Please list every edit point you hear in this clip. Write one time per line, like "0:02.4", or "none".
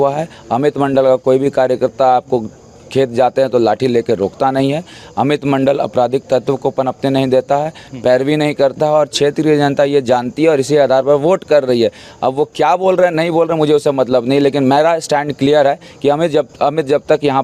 none